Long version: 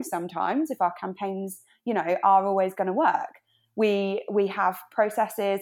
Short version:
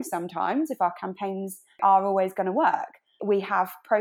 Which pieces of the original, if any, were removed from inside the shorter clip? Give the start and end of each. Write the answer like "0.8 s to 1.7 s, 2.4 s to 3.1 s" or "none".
1.8 s to 2.2 s, 3.6 s to 4.2 s